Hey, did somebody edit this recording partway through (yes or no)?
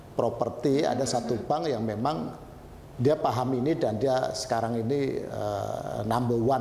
no